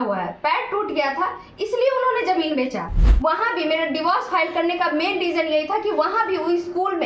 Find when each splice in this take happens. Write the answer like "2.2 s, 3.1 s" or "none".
3.0 s

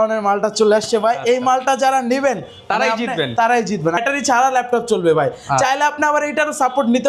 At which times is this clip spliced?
4.0 s

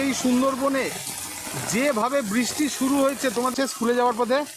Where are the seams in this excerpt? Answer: 3.5 s

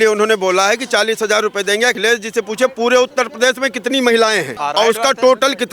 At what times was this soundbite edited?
2.0 s, 4.5 s

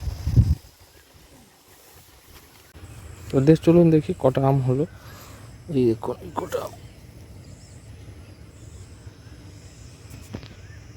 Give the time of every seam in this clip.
2.7 s

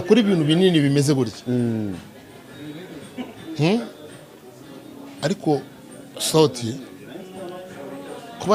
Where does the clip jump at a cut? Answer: none

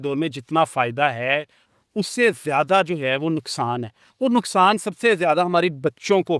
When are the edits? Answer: none

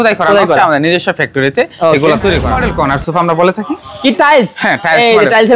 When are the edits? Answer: 2.6 s

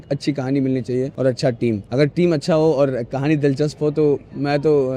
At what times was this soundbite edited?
1.1 s, 1.8 s

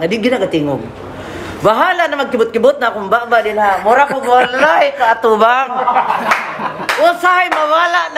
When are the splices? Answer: none

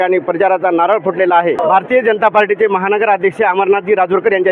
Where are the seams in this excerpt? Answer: 1.6 s

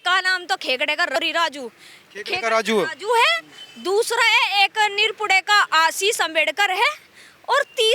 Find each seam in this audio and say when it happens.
1.2 s

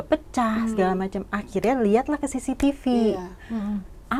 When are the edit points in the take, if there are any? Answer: none

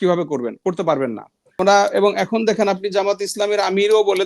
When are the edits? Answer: 1.6 s

